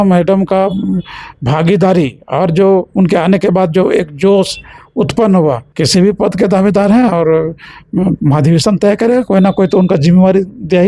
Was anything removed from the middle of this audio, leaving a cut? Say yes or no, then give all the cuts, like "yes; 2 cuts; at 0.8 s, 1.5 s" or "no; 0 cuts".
yes; 1 cut; at 5.7 s